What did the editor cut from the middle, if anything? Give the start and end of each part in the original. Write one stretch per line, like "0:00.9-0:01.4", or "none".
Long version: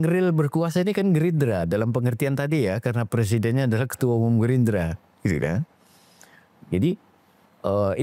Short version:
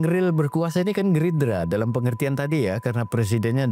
none